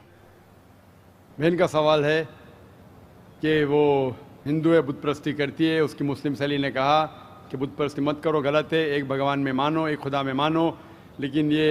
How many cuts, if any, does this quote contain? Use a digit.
1